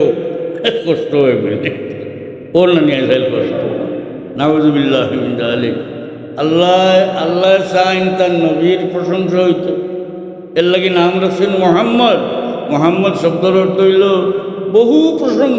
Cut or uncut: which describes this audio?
uncut